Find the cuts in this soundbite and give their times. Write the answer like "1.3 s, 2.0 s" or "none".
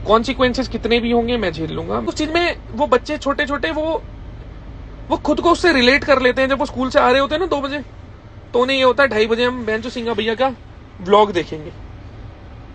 2.0 s